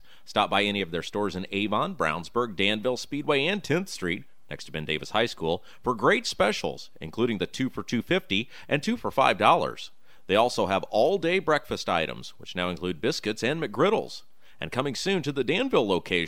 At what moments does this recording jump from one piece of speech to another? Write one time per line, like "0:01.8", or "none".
none